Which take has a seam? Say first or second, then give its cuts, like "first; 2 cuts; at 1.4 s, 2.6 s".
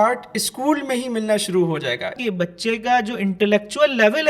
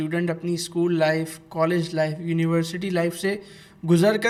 first; 1 cut; at 2.2 s